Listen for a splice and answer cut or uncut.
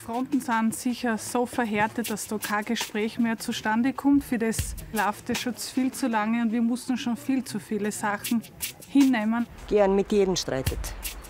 cut